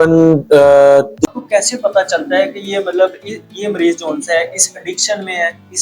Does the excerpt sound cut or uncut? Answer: cut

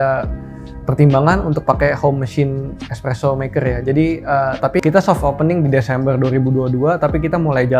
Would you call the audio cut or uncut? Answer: cut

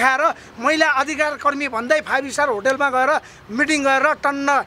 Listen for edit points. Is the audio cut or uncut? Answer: uncut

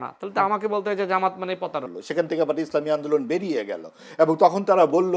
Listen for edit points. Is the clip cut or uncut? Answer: cut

